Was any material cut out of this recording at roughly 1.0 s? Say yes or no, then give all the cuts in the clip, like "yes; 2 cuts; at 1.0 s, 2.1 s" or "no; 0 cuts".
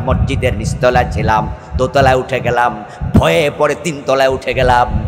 no; 0 cuts